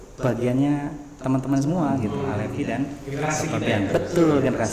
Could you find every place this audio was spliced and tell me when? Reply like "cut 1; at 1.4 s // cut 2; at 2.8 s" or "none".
none